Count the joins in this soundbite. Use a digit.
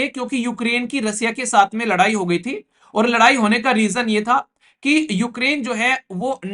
0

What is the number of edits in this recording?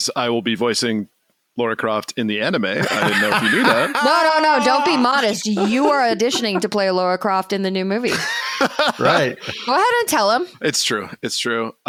0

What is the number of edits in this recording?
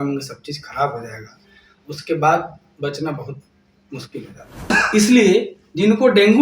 1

